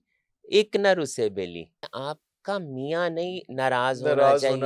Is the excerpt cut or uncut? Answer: cut